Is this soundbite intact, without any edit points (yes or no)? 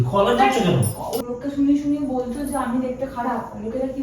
no